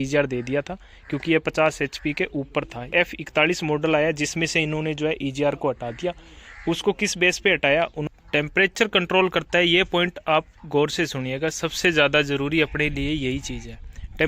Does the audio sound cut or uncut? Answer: cut